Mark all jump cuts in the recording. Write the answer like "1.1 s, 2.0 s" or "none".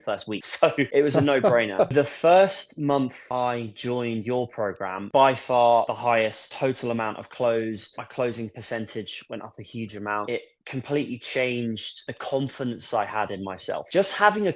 1.9 s